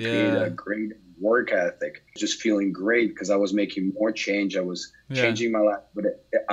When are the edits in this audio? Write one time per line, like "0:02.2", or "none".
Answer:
0:02.2